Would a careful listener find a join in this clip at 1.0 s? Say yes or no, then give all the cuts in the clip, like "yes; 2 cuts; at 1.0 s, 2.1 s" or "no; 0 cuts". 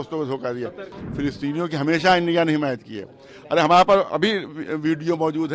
yes; 1 cut; at 1.0 s